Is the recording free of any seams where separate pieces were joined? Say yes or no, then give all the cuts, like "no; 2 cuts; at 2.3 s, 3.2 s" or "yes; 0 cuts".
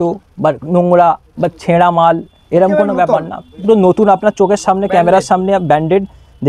yes; 0 cuts